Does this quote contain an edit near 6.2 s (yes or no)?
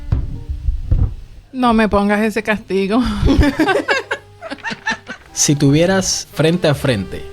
yes